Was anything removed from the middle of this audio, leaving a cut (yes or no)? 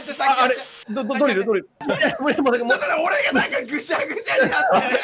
yes